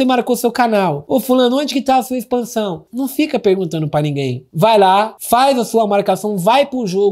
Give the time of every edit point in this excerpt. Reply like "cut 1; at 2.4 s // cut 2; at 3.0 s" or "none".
cut 1; at 2.8 s